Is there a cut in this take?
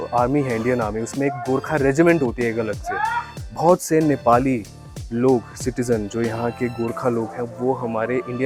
no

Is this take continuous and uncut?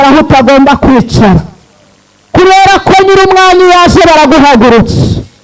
yes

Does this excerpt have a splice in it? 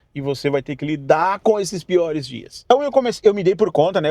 yes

